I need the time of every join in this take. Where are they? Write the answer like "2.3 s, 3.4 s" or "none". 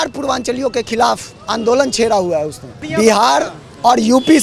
2.8 s